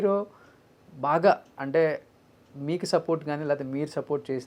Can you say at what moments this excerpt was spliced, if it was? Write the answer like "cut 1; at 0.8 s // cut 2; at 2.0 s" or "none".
none